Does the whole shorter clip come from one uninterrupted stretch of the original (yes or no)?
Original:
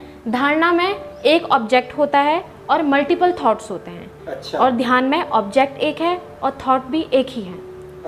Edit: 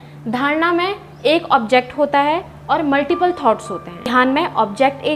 no